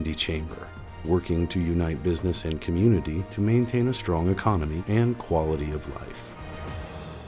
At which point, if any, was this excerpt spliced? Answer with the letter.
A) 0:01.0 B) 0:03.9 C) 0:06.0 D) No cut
C